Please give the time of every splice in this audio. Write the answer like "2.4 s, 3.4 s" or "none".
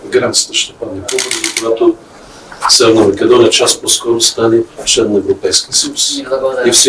none